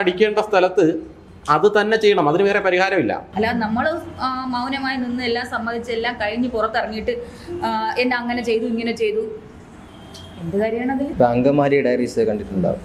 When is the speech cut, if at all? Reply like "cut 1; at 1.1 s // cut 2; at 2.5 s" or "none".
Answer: cut 1; at 3.3 s // cut 2; at 11.1 s